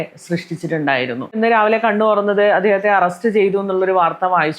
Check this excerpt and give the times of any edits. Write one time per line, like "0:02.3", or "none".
0:01.4